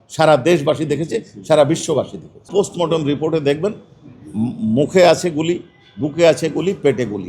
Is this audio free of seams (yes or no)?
no